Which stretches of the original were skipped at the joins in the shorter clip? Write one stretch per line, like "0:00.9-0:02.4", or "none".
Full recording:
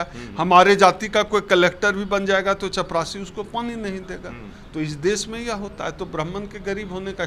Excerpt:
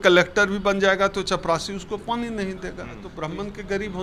0:04.5-0:06.0